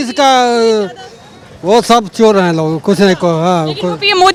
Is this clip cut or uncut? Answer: uncut